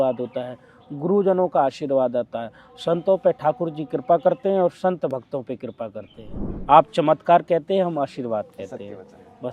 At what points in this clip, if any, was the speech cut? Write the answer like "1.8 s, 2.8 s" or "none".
6.4 s